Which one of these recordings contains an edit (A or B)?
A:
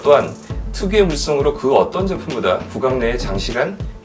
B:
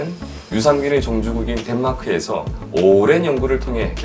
B